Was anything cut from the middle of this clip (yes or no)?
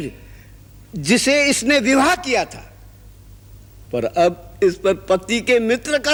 no